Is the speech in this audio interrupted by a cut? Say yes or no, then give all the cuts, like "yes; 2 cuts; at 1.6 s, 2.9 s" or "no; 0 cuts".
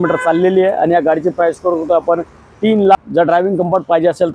yes; 1 cut; at 3.0 s